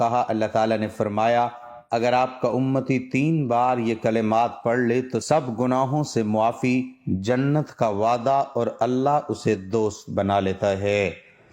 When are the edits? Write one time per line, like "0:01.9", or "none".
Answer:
0:07.0